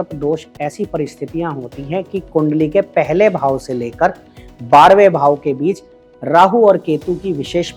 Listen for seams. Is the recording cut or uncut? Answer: uncut